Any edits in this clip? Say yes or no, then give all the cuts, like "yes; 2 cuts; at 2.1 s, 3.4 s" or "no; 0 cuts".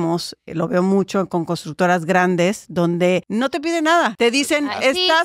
yes; 2 cuts; at 3.3 s, 4.1 s